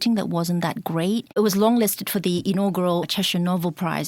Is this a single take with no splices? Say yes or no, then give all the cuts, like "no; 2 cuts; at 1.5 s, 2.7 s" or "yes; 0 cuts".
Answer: no; 2 cuts; at 1.4 s, 3.1 s